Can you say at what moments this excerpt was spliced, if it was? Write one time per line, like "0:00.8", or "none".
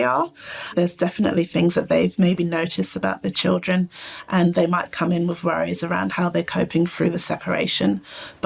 0:06.1